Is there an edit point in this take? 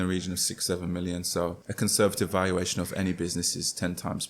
yes; 1 cut; at 1.6 s

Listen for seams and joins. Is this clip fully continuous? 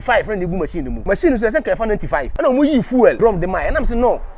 no; 3 cuts; at 0.9 s, 2.3 s, 3.2 s

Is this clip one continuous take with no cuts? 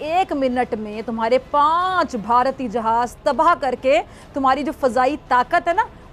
yes; 0 cuts

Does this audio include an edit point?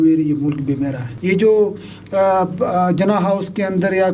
yes; 1 cut; at 1.1 s

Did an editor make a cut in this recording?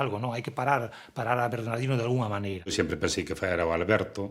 no; 0 cuts

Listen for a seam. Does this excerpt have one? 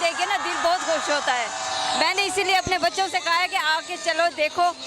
no; 0 cuts

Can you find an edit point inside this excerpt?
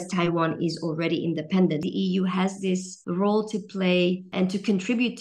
yes; 3 cuts; at 1.9 s, 2.9 s, 4.3 s

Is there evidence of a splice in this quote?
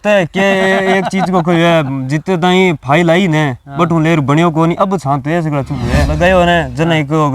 yes; 1 cut; at 6.1 s

